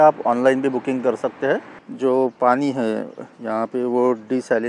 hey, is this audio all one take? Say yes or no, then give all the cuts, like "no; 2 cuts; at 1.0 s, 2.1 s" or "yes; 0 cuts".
no; 1 cut; at 1.8 s